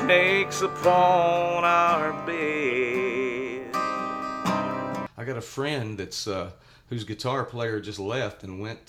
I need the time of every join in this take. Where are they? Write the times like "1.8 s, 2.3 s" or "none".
5.1 s